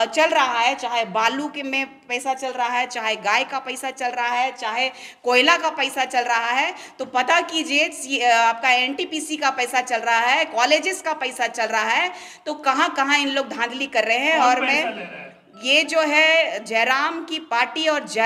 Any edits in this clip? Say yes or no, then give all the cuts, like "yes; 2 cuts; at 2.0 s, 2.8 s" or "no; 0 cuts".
no; 0 cuts